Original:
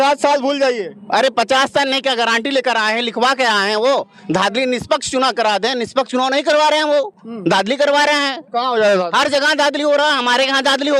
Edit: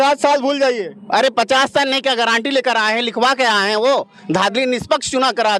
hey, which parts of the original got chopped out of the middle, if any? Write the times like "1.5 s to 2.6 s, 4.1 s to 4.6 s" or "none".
none